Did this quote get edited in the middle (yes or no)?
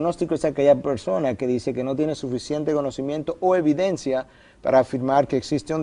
yes